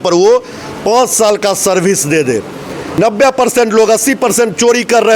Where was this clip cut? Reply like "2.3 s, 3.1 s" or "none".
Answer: 3.0 s